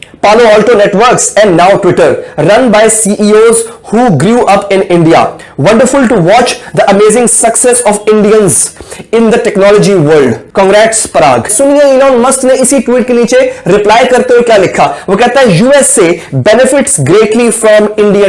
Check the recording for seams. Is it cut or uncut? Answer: uncut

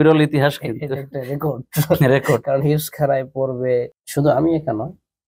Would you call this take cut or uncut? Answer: cut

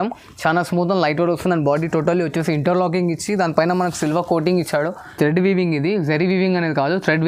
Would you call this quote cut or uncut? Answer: cut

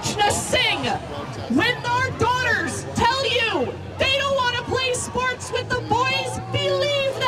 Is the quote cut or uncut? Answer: uncut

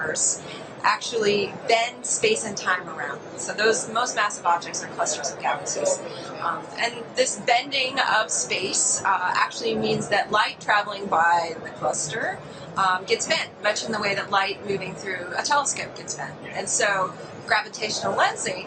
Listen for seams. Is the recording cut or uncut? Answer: cut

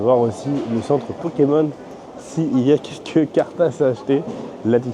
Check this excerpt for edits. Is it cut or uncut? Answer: uncut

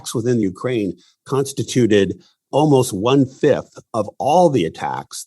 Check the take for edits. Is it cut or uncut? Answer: uncut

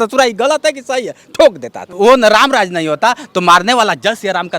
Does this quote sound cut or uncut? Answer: cut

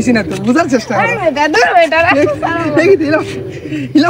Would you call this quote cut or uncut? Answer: uncut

